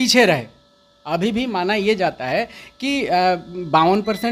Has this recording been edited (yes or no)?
no